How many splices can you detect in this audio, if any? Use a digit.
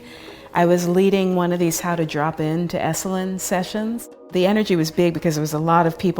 1